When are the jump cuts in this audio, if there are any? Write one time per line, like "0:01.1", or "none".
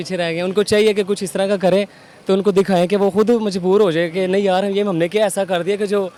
none